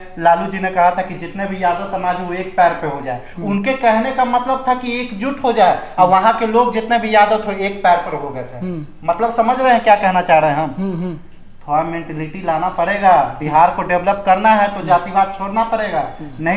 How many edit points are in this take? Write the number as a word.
zero